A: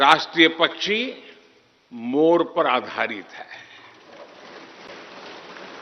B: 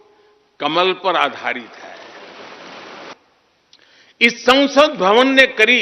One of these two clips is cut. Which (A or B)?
B